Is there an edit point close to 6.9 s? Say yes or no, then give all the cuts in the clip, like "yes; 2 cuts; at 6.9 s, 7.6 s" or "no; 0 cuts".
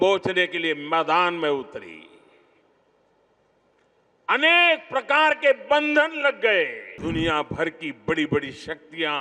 yes; 1 cut; at 6.9 s